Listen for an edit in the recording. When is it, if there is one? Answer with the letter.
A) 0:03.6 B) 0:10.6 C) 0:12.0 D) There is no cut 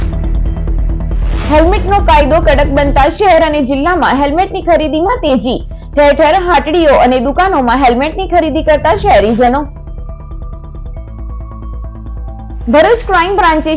D